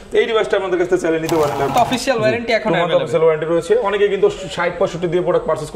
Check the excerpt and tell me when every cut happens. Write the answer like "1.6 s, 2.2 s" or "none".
1.7 s